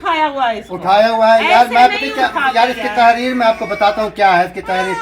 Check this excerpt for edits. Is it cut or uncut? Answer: uncut